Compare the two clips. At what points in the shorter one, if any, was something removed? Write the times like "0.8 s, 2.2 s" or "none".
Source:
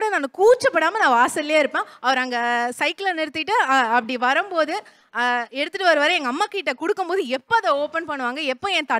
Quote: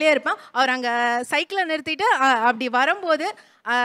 none